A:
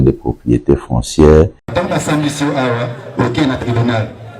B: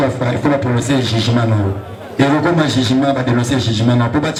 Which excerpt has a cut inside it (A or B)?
A